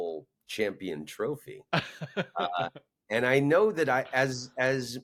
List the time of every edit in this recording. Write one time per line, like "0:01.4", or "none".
none